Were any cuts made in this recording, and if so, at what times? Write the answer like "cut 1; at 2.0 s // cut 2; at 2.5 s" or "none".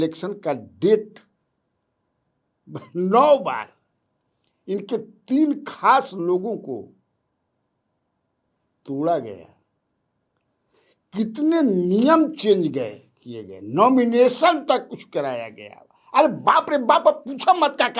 none

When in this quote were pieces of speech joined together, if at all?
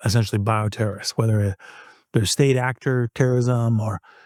none

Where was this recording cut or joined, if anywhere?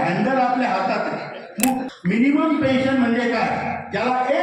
cut 1; at 1.9 s

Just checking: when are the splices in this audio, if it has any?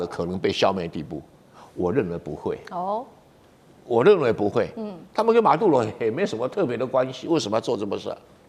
none

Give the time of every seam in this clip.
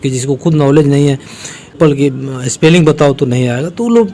cut 1; at 1.8 s

